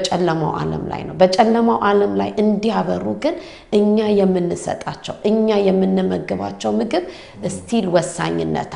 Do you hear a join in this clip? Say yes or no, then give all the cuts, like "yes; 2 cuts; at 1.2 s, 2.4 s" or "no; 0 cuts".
no; 0 cuts